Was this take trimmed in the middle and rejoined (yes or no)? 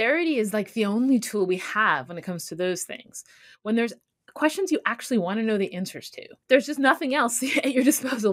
yes